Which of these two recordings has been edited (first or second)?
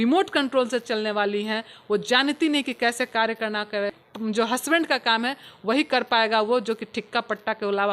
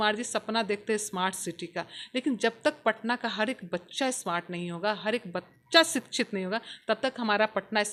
first